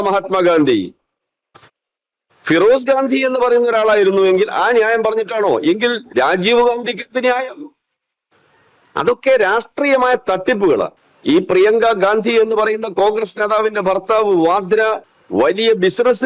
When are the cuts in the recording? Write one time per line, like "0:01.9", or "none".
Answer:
0:11.1
0:15.1